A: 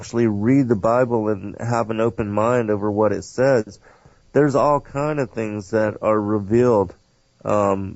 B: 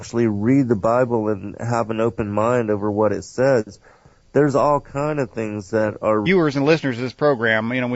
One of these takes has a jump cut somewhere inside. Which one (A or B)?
A